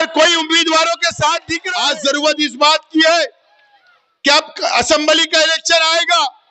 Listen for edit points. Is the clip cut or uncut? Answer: cut